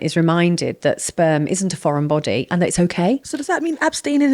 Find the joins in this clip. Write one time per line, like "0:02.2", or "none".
0:03.3